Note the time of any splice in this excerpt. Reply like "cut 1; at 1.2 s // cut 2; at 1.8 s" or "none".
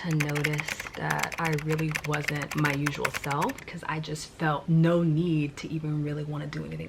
cut 1; at 1.1 s // cut 2; at 3.6 s